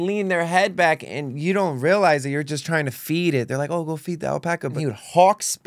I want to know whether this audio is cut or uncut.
cut